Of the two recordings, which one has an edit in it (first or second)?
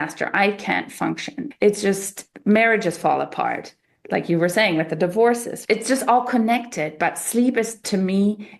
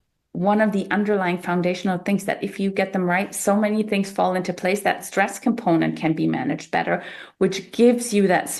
first